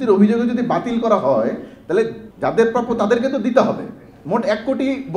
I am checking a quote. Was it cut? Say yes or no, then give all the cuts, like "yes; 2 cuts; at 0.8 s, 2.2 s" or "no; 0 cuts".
yes; 1 cut; at 2.2 s